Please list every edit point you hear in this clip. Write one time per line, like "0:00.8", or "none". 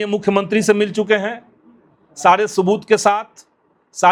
none